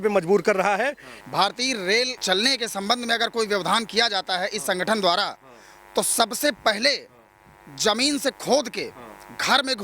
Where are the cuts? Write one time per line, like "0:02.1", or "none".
0:01.1
0:02.2